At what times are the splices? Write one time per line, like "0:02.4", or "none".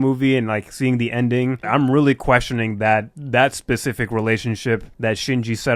0:01.6

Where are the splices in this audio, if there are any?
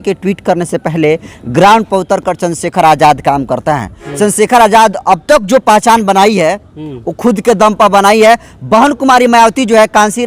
0:04.0

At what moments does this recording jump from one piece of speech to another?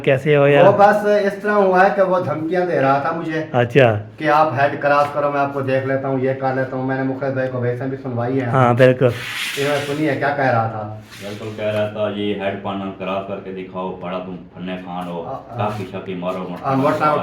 none

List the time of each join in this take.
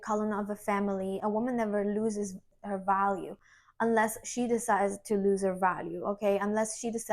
0:02.5

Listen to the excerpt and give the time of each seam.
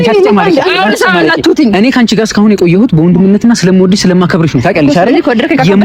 none

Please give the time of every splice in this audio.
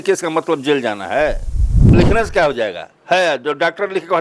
0:01.9

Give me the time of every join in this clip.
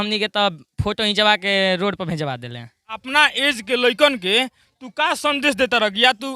0:03.0

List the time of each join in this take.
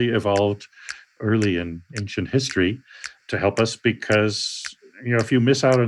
0:02.0

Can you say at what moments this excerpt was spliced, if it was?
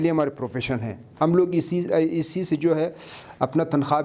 none

